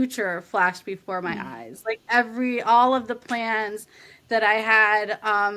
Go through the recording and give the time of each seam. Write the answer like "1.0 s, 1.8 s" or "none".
none